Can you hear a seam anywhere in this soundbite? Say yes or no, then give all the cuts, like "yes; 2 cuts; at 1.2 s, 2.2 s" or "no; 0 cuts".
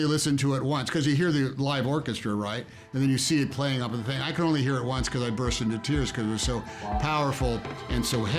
no; 0 cuts